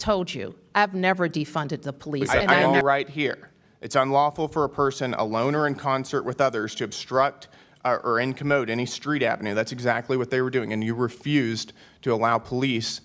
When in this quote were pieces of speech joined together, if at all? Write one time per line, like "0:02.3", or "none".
0:02.7